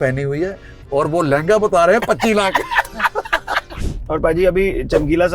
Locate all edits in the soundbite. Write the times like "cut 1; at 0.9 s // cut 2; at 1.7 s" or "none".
cut 1; at 3.7 s